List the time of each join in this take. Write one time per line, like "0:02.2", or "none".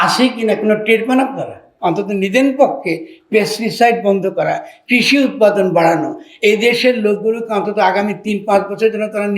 0:01.6